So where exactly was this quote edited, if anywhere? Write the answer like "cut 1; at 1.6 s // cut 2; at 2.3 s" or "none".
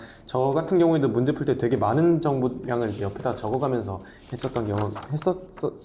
none